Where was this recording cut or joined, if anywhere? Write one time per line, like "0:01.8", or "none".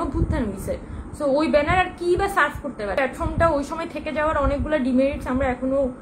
0:03.0

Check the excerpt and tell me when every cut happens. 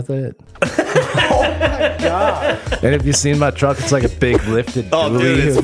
none

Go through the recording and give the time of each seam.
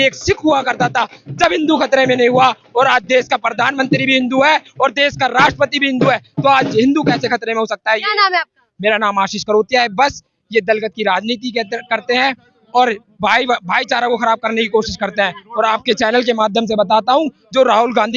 none

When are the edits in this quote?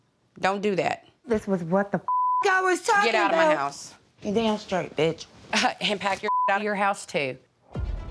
0:01.1

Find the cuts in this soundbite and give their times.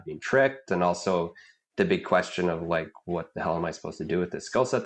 none

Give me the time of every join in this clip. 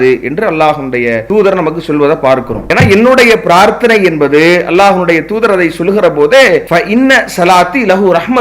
0:01.2
0:02.6

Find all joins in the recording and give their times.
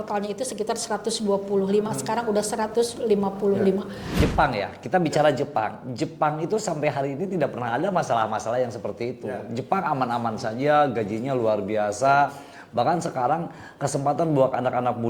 0:04.1

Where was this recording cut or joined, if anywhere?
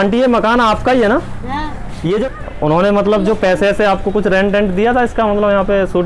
0:02.2

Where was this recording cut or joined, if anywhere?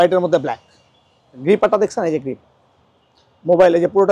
0:01.4

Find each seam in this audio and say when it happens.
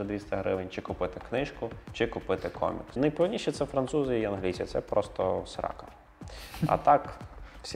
0:02.9

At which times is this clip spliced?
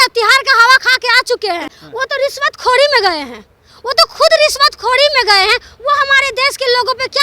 0:01.8

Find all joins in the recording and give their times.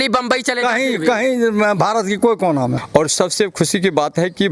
0:02.8

